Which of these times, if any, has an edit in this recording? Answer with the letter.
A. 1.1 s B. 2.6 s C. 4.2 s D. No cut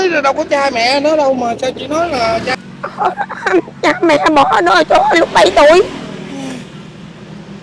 B